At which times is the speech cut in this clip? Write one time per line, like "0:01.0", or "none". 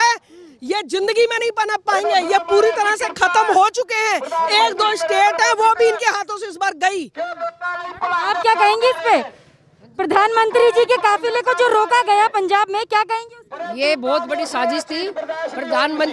none